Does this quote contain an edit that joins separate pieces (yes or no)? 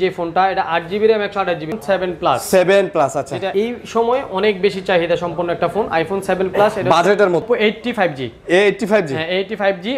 yes